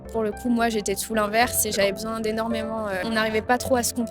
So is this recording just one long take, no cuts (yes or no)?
no